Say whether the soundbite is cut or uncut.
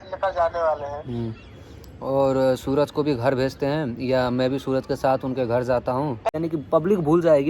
cut